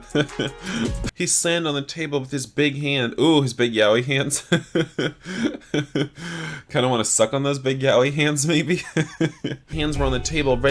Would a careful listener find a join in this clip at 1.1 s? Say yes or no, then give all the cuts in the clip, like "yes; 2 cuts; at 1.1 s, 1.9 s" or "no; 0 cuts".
yes; 2 cuts; at 1.1 s, 9.7 s